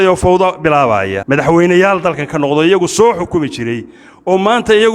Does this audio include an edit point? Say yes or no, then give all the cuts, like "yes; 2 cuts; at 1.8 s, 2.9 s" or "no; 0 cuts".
yes; 1 cut; at 1.2 s